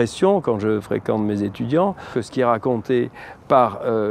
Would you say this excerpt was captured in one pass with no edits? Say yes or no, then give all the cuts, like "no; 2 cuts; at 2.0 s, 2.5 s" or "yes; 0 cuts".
no; 1 cut; at 2.1 s